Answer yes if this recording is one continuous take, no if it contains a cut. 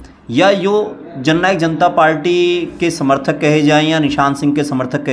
yes